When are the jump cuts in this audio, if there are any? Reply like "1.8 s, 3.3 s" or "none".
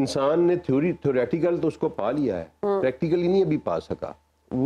none